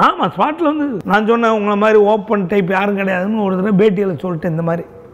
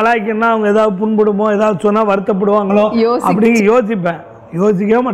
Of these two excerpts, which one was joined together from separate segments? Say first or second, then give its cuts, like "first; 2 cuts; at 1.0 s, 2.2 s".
first; 1 cut; at 1.0 s